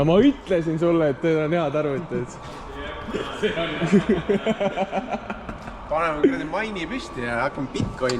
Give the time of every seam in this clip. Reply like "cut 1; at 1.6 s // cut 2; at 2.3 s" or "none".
none